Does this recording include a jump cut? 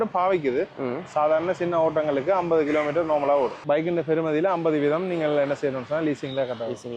yes; 1 cut; at 3.6 s

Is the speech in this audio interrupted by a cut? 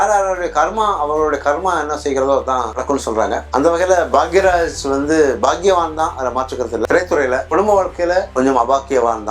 no; 0 cuts

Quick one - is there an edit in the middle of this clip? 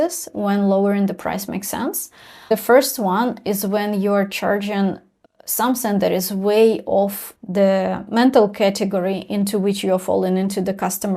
yes; 2 cuts; at 2.5 s, 7.3 s

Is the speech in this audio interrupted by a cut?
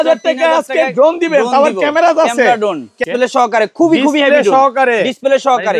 yes; 1 cut; at 3.0 s

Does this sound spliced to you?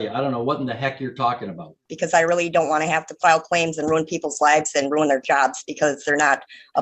yes; 1 cut; at 1.9 s

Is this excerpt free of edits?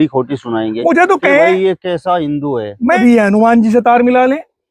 no; 1 cut; at 3.0 s

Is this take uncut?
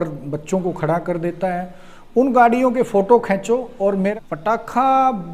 no; 1 cut; at 4.1 s

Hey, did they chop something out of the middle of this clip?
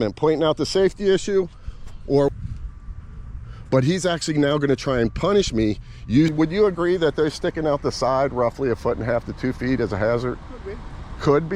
yes; 2 cuts; at 2.3 s, 6.3 s

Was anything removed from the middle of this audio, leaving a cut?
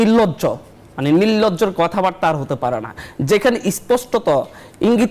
no; 0 cuts

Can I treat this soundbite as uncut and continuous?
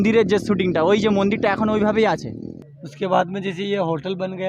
no; 1 cut; at 2.6 s

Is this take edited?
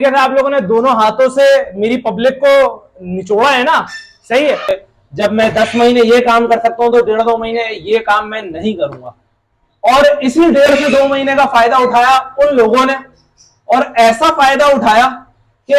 yes; 1 cut; at 4.8 s

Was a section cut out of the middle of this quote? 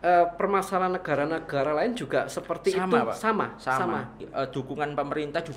yes; 1 cut; at 4.2 s

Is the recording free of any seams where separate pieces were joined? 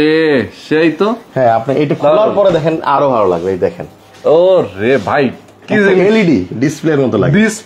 yes; 0 cuts

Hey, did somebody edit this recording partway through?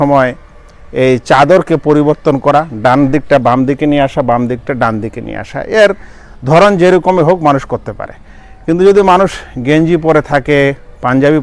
no; 0 cuts

